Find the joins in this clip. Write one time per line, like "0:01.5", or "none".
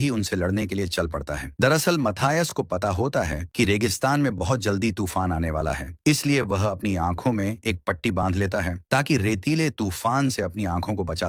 none